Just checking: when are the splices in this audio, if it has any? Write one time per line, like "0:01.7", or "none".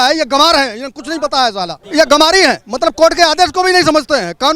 0:01.8